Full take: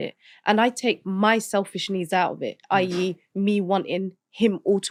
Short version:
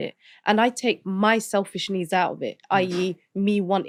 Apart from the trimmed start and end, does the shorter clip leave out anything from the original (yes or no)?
no